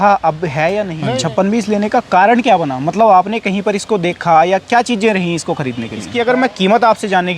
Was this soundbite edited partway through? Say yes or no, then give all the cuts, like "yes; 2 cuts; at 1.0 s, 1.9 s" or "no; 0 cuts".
yes; 2 cuts; at 1.0 s, 6.0 s